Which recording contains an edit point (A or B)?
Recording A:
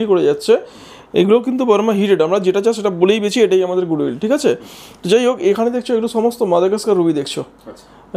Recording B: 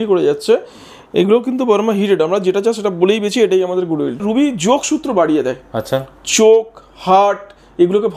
B